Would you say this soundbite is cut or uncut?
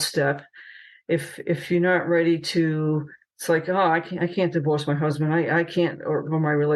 uncut